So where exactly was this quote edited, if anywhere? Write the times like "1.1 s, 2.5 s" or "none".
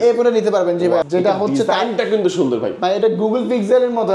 1.1 s